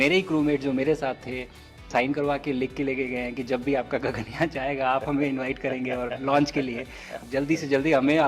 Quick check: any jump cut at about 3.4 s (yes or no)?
no